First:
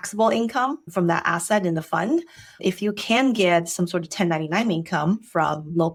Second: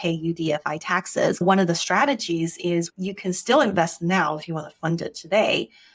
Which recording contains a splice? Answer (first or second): second